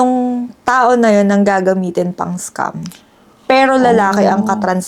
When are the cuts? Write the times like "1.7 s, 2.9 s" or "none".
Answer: none